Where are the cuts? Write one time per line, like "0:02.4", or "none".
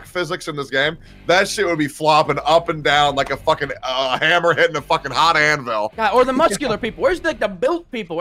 0:05.9

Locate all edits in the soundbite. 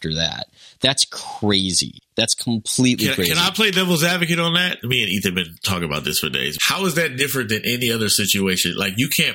none

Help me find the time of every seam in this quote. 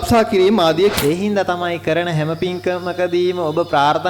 0:00.9

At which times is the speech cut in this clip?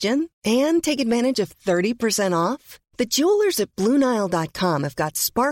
none

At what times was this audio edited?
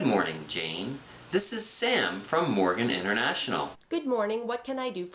0:03.8

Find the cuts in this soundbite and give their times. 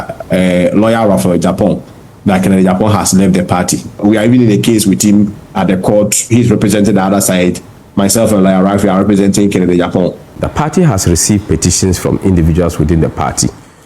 0:03.9
0:10.3

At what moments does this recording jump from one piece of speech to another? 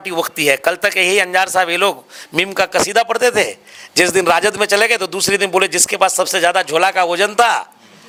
none

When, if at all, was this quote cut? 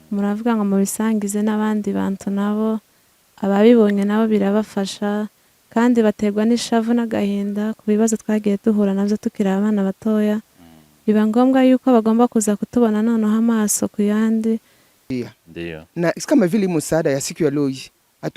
0:15.1

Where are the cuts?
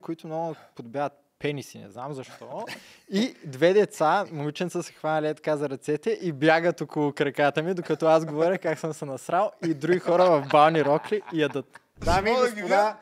0:12.0

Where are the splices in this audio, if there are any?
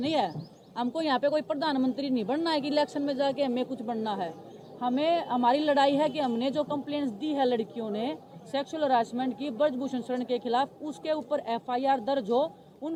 none

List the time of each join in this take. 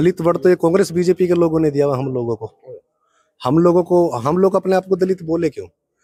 none

